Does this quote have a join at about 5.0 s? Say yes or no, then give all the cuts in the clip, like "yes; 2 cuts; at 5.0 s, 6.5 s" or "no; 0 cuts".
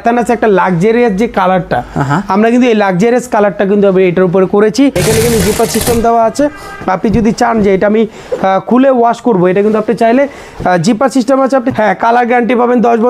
yes; 2 cuts; at 5.0 s, 11.7 s